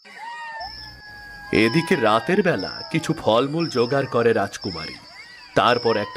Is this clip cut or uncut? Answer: cut